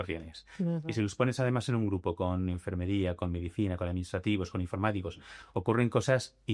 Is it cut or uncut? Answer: uncut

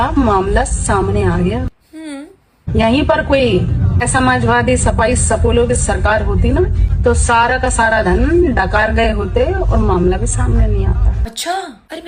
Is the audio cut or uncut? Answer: uncut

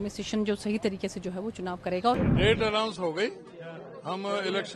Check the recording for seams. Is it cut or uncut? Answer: cut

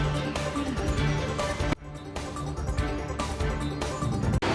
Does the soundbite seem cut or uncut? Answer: cut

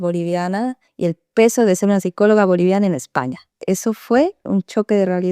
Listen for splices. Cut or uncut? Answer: cut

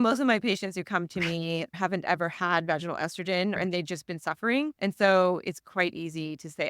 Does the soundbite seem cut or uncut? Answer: cut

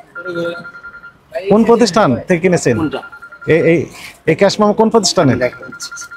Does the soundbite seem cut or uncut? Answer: uncut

